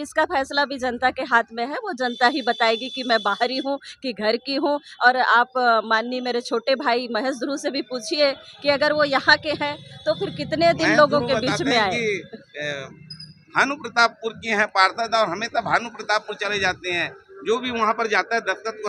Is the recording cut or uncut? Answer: uncut